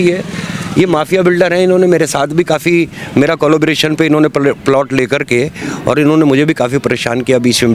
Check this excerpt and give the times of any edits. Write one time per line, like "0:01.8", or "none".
none